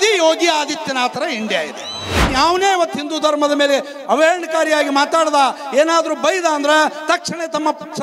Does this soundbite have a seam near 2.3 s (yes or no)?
yes